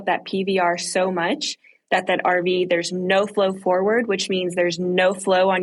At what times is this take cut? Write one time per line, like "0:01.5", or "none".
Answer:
none